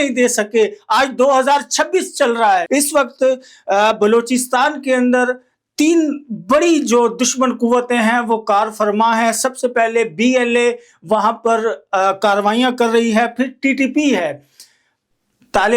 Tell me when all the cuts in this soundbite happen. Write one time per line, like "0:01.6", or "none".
0:02.6